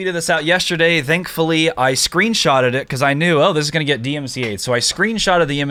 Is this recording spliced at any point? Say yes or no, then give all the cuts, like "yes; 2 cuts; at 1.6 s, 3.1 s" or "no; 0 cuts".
no; 0 cuts